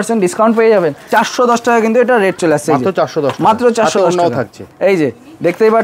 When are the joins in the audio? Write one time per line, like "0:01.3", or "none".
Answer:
0:01.1